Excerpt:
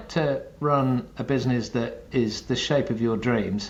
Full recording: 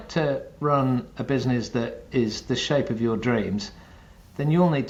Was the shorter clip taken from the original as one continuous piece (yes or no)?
yes